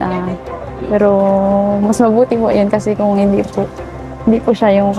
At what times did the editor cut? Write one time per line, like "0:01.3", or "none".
none